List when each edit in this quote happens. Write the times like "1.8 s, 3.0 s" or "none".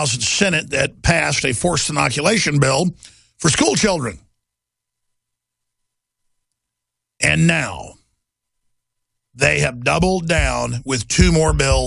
10.5 s